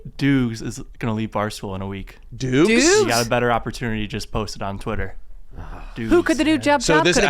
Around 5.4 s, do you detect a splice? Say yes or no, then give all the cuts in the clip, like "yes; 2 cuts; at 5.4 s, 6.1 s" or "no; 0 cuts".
yes; 1 cut; at 5.4 s